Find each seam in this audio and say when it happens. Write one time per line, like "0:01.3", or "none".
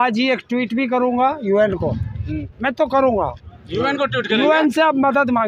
none